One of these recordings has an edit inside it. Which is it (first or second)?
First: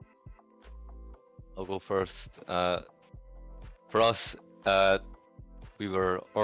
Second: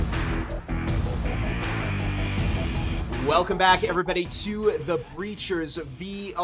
second